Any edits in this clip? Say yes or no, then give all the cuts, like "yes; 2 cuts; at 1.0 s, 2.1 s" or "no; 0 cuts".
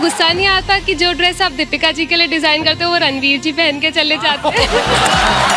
no; 0 cuts